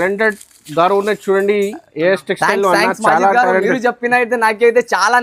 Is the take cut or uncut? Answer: uncut